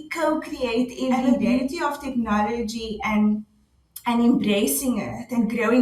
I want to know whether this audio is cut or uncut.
cut